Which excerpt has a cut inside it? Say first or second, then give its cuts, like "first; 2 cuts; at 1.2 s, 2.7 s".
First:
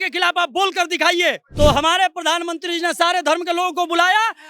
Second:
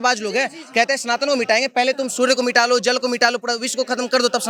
first; 1 cut; at 1.5 s